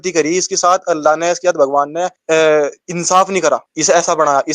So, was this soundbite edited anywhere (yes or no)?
yes